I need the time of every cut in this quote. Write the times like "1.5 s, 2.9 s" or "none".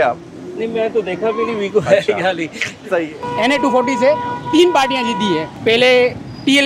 3.2 s, 5.5 s

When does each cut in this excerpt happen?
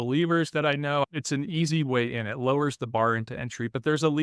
1.0 s

